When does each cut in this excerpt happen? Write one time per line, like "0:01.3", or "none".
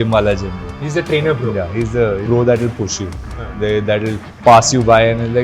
0:02.2
0:04.3